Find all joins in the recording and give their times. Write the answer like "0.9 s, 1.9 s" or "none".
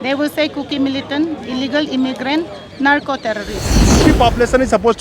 4.0 s